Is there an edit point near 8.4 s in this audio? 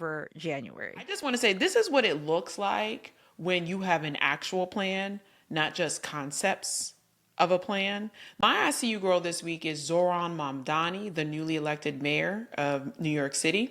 yes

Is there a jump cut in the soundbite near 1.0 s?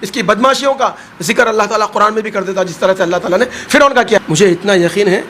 no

